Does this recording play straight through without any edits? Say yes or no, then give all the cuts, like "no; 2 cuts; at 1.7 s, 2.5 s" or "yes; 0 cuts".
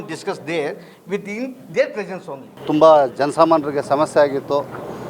yes; 0 cuts